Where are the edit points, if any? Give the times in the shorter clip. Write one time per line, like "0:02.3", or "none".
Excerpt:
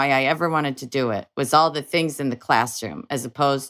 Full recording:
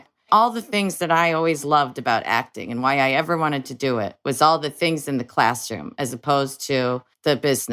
none